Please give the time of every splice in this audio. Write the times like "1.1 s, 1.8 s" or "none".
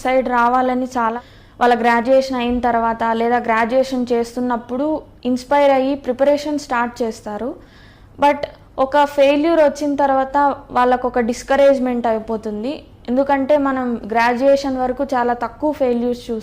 1.2 s